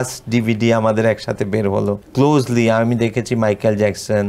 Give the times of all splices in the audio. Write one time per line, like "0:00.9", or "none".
0:02.0